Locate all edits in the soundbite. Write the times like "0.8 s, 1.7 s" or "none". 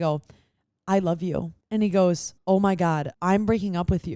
1.6 s, 2.3 s, 3.1 s